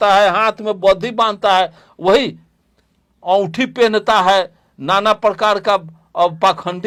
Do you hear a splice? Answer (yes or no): no